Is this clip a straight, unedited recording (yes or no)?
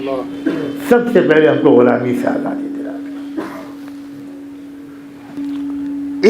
no